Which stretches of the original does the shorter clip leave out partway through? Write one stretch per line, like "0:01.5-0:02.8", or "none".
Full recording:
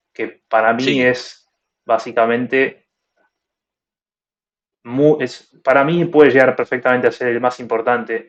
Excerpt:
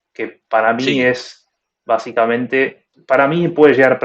0:02.9-0:05.5

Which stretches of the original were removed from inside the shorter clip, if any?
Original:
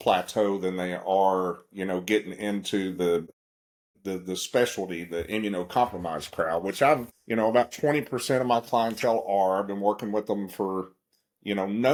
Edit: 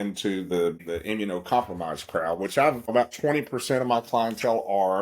0:03.3-0:05.1
0:07.2-0:07.5

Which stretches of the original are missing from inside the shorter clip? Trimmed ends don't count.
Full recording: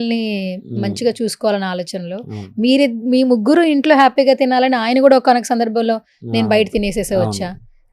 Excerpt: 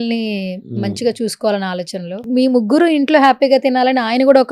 0:02.2-0:03.0

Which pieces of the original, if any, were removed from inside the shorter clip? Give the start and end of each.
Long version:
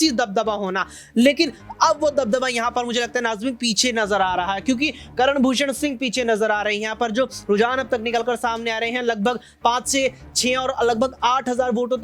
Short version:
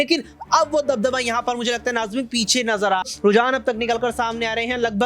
0:04.3-0:07.3

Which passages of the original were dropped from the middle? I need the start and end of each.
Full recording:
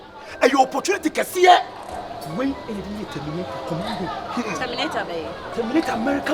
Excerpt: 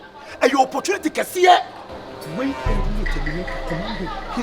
none

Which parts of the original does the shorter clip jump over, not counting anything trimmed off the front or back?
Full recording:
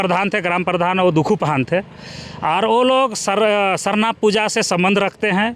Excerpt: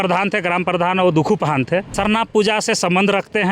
0:01.9-0:03.8

